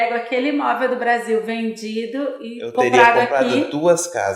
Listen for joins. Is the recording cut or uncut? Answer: uncut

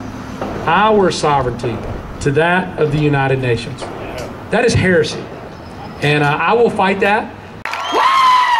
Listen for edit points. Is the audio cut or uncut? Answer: cut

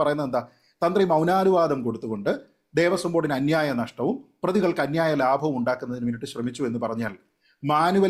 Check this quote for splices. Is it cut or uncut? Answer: uncut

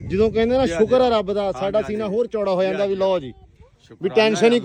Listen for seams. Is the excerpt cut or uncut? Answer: uncut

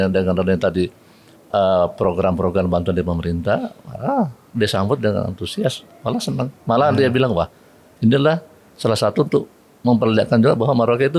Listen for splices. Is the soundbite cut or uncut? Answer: uncut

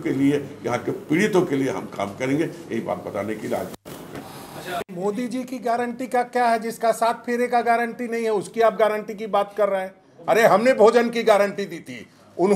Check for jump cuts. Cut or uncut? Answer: uncut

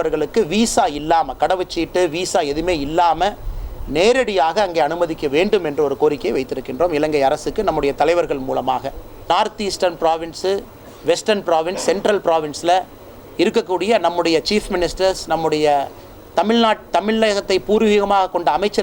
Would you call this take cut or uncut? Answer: cut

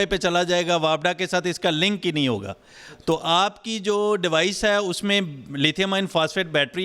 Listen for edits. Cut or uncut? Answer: uncut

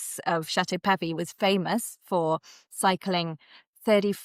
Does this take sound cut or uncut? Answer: uncut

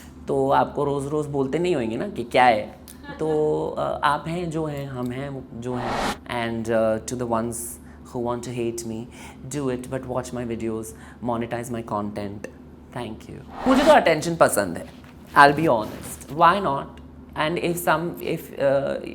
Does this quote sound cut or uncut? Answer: cut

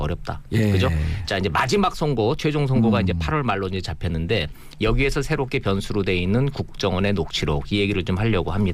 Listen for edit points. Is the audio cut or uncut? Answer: cut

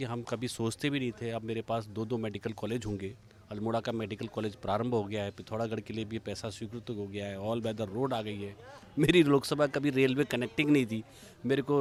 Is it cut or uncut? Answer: uncut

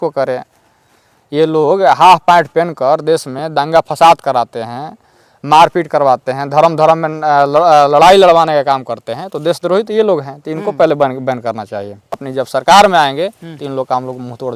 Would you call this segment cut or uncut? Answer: cut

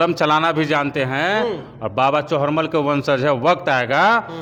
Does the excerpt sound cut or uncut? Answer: uncut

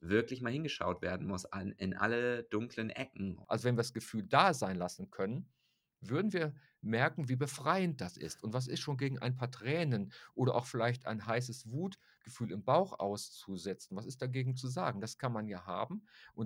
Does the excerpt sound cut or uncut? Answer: cut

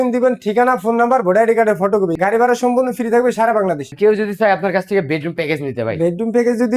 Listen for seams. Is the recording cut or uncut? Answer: cut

